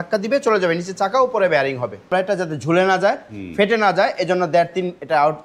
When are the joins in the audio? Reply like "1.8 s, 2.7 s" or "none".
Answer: 2.1 s